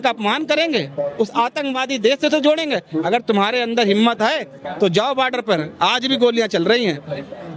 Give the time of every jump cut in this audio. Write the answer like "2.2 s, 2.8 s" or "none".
none